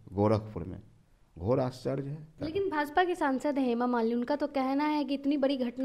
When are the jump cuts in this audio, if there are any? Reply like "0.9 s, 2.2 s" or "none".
2.3 s